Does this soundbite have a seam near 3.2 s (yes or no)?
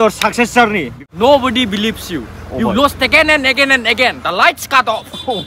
no